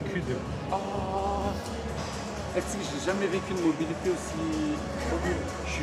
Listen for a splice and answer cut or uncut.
uncut